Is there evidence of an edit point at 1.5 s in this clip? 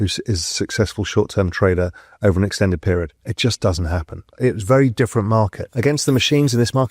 no; 3 cuts; at 3.2 s, 4.3 s, 5.6 s

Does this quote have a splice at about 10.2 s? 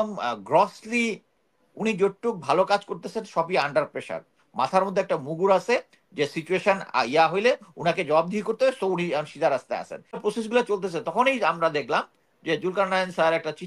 yes; 1 cut; at 10.2 s

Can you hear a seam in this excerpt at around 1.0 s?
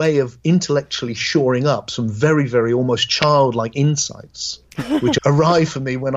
no; 1 cut; at 5.2 s

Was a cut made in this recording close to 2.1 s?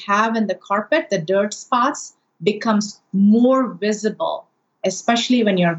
yes; 2 cuts; at 2.1 s, 4.8 s

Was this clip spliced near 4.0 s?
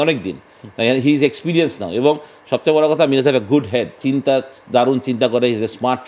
yes; 1 cut; at 4.0 s

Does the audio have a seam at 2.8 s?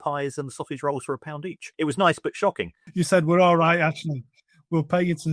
yes; 2 cuts; at 1.7 s, 2.8 s

